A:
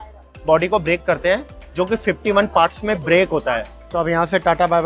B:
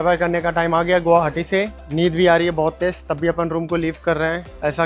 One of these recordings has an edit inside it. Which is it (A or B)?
A